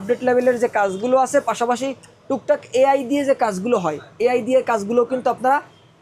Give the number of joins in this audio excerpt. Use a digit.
0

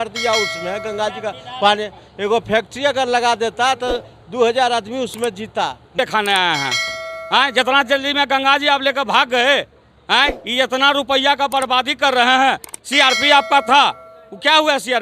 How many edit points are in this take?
1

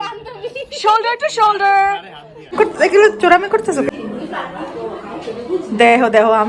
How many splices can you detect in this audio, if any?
2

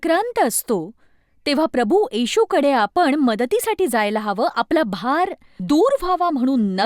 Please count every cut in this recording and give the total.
1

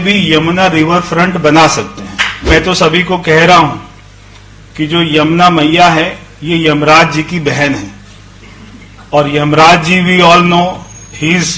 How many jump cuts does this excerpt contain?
1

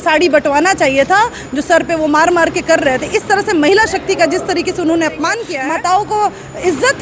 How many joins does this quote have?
1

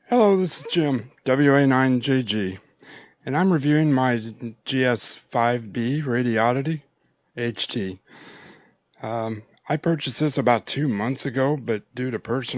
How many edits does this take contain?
0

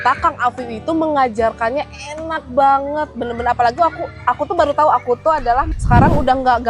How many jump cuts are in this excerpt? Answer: 1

